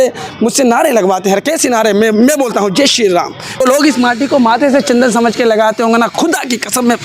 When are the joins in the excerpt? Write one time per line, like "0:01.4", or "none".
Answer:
0:03.6